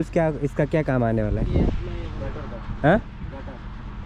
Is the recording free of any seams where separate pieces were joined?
yes; 0 cuts

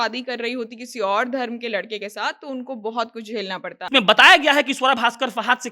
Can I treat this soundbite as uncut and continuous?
no; 1 cut; at 3.8 s

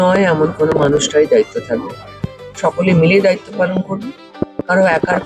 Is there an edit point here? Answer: no; 0 cuts

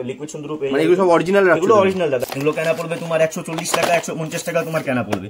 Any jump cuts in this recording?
yes; 1 cut; at 2.3 s

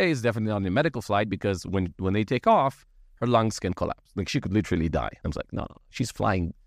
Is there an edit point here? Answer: yes; 1 cut; at 5.2 s

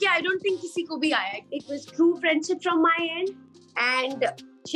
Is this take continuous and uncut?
no; 1 cut; at 1.5 s

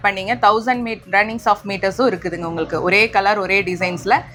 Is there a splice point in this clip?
no; 0 cuts

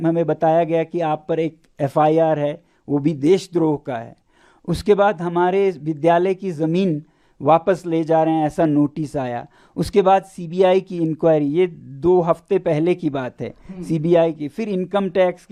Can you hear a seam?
no; 0 cuts

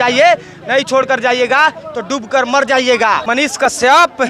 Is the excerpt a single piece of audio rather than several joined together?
no; 1 cut; at 3.2 s

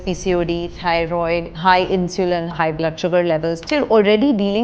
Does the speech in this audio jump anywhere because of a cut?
yes; 3 cuts; at 1.5 s, 2.5 s, 3.6 s

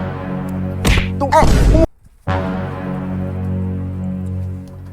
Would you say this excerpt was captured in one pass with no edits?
no; 1 cut; at 1.9 s

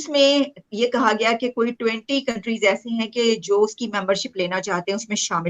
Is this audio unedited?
yes; 0 cuts

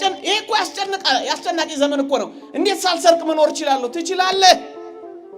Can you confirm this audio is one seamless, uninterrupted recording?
yes; 0 cuts

